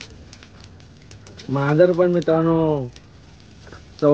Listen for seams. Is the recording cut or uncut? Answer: uncut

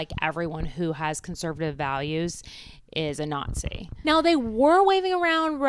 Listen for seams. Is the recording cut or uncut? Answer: cut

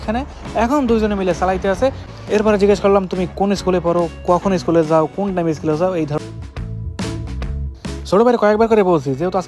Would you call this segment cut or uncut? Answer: cut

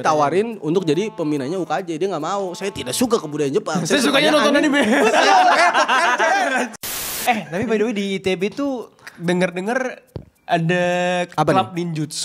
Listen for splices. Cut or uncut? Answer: cut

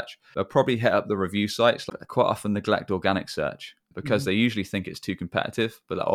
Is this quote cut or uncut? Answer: cut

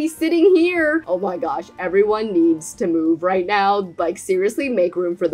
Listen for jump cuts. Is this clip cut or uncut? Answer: uncut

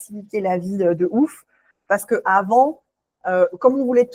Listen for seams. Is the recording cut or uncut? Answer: uncut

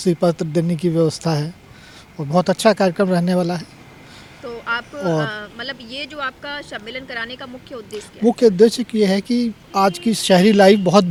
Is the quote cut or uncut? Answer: uncut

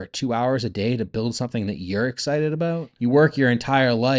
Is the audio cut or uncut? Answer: cut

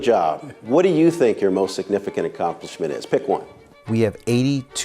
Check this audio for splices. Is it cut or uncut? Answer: cut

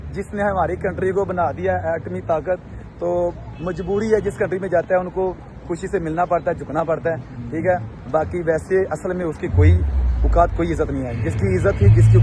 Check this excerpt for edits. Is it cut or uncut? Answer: uncut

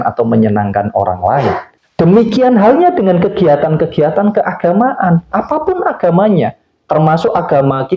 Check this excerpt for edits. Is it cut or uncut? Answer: cut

